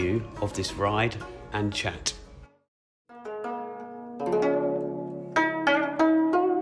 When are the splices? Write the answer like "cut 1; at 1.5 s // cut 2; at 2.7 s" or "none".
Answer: cut 1; at 2.6 s

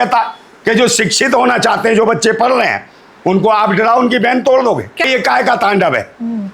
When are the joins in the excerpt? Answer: cut 1; at 5.0 s

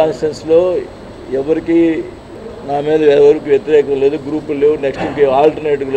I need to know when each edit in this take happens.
none

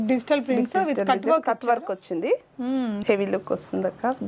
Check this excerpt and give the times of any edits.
cut 1; at 3.0 s

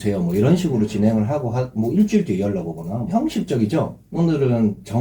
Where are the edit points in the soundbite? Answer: cut 1; at 3.1 s // cut 2; at 4.1 s

